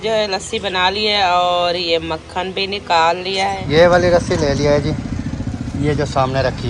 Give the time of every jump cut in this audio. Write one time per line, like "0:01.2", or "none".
0:03.6